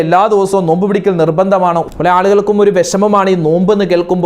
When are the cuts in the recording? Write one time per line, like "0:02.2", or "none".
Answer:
0:01.8